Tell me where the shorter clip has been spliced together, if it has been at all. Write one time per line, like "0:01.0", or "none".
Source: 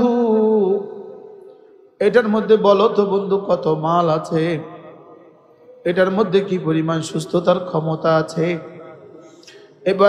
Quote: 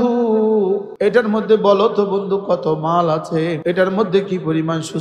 0:00.9
0:03.6